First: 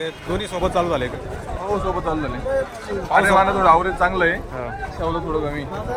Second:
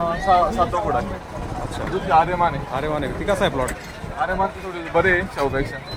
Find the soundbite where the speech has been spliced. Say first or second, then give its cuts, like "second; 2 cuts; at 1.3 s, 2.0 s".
second; 1 cut; at 1.9 s